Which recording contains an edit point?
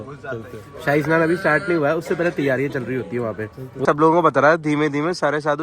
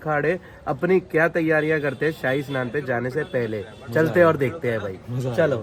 first; 1 cut; at 3.8 s

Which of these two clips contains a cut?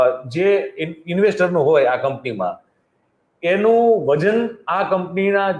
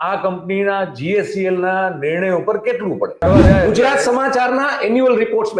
second; 1 cut; at 3.2 s

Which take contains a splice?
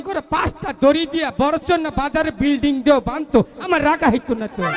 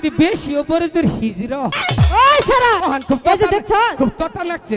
second; 2 cuts; at 1.8 s, 2.8 s

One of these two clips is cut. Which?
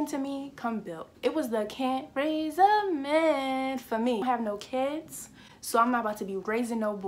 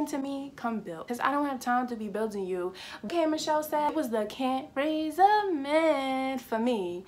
first; 2 cuts; at 1.2 s, 4.2 s

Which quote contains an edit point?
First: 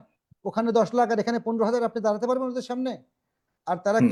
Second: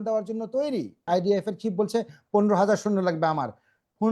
second; 1 cut; at 1.1 s

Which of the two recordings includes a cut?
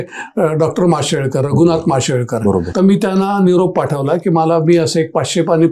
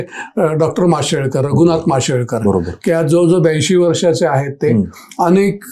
first; 1 cut; at 2.7 s

